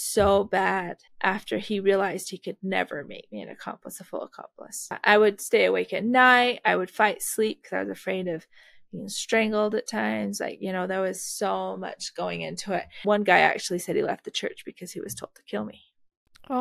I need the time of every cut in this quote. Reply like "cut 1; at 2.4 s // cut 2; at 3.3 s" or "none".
cut 1; at 1.0 s // cut 2; at 5.0 s // cut 3; at 13.0 s